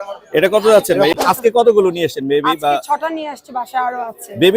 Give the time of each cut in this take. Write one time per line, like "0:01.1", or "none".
0:01.1